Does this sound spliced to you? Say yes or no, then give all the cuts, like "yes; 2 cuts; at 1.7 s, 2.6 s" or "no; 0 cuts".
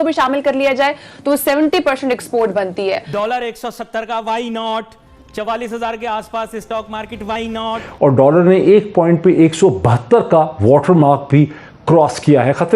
yes; 2 cuts; at 3.1 s, 7.8 s